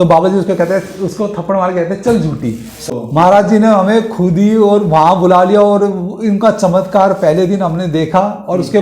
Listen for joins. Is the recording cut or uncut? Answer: cut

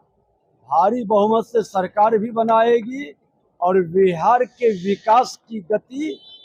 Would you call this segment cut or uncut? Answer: uncut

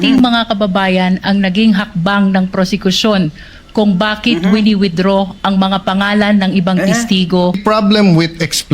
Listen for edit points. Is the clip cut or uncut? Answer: cut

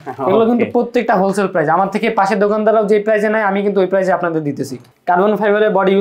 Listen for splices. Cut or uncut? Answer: cut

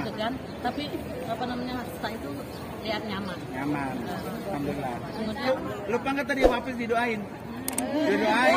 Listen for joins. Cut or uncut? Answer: cut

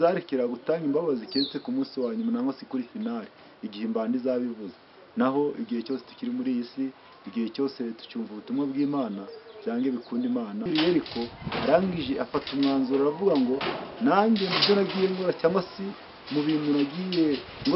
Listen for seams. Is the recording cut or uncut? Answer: cut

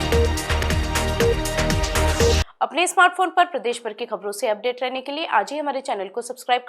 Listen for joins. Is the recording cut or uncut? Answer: uncut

